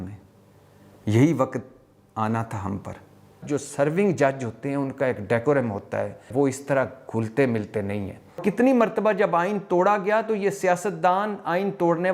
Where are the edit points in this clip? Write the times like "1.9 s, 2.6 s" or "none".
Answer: 3.4 s, 6.3 s, 8.4 s